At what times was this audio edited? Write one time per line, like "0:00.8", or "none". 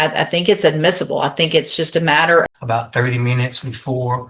0:02.5